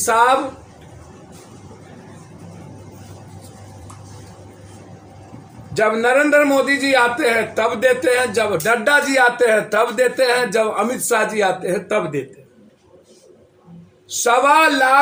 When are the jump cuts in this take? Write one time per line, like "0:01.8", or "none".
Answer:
none